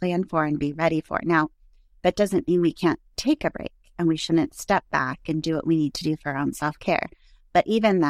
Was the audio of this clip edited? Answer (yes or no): no